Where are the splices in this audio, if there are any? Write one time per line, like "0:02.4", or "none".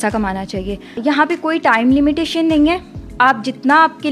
0:01.0